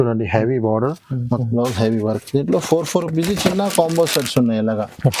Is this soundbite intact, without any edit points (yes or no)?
no